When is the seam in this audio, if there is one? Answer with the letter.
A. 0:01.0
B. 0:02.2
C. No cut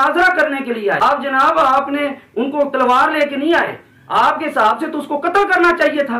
A